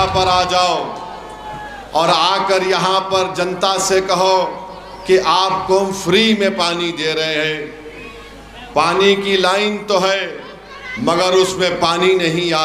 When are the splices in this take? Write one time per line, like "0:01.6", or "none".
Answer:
none